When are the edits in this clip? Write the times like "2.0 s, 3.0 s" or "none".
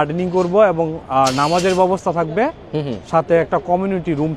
1.0 s